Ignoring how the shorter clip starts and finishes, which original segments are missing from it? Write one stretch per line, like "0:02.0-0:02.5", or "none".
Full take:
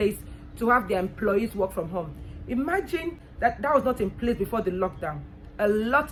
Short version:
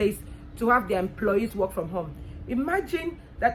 none

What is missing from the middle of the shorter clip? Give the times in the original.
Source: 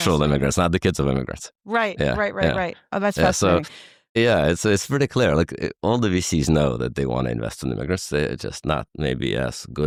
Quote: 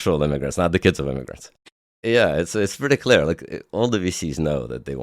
0:01.6-0:03.7

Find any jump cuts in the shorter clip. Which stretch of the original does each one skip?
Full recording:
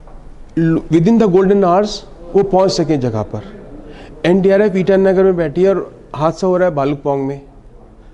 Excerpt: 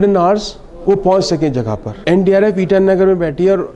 0:03.3-0:04.0

